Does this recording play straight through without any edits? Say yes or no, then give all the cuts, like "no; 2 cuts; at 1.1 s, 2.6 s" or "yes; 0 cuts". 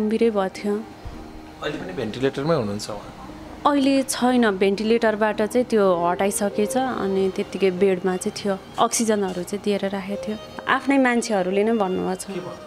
no; 1 cut; at 10.6 s